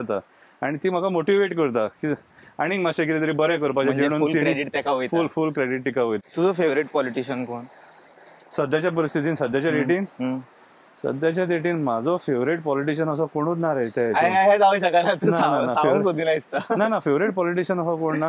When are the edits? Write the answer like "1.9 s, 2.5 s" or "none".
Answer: 6.2 s